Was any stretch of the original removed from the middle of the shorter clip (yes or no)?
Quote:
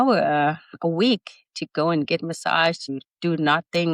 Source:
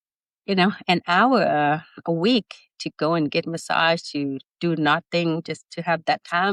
yes